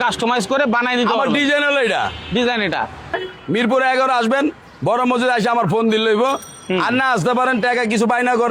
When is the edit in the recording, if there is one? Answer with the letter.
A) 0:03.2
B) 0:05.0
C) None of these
A